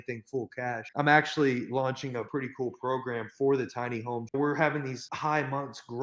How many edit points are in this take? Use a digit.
4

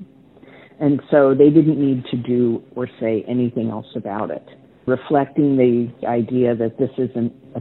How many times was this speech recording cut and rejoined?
2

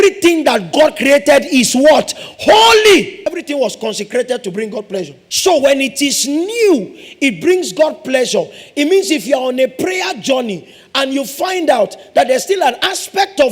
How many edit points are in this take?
2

